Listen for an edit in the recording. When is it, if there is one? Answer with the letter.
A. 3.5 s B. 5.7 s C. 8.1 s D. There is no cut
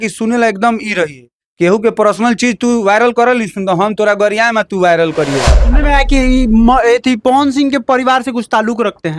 B